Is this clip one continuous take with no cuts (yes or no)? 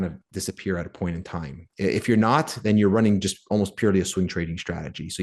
yes